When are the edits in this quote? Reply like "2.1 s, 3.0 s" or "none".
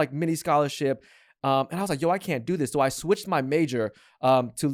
none